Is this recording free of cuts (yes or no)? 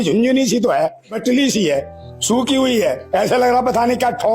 no